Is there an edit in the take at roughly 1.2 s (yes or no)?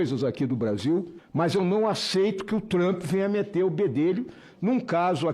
yes